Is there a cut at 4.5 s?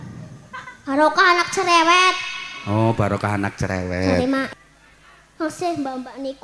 yes; 1 cut; at 4.5 s

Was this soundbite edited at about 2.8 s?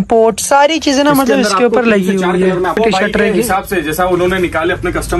yes; 1 cut; at 2.8 s

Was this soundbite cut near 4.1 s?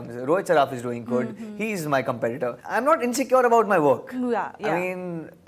no; 1 cut; at 2.6 s

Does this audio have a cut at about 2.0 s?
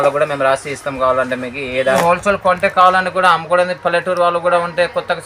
yes; 1 cut; at 2.0 s

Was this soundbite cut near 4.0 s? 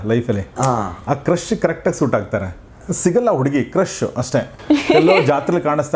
no; 0 cuts

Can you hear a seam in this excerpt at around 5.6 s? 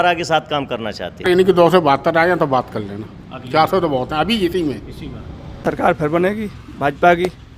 yes; 2 cuts; at 1.2 s, 5.6 s

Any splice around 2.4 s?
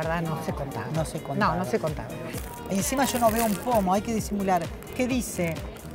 yes; 1 cut; at 2.4 s

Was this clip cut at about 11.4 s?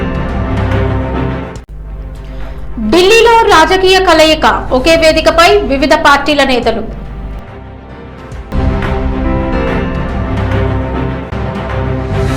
yes; 2 cuts; at 1.3 s, 11.4 s

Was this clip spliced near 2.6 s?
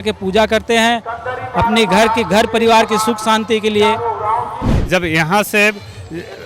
no; 1 cut; at 4.7 s

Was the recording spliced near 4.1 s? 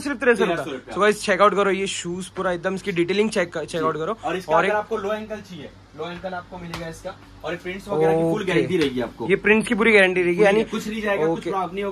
no; 0 cuts

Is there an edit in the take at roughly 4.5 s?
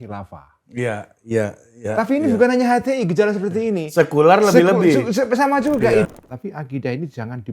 no; 1 cut; at 6.1 s

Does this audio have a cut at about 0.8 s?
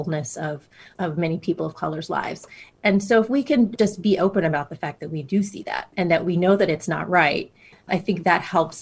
yes; 5 cuts; at 0.8 s, 2.7 s, 3.7 s, 5.9 s, 7.9 s

